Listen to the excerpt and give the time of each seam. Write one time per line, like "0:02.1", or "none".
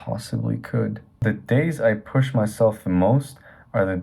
0:01.2